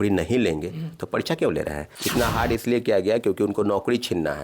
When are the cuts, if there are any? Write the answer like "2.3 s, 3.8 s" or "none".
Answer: 1.9 s